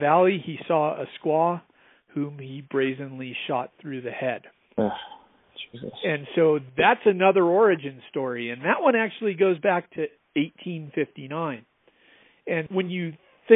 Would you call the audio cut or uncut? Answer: cut